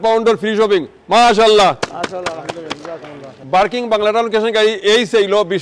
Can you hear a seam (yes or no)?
yes